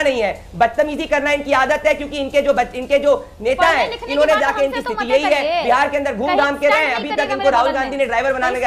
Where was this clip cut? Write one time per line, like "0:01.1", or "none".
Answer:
none